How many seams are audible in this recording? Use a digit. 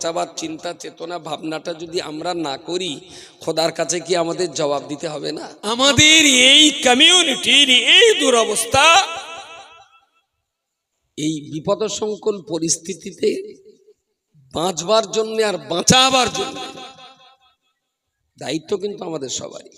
1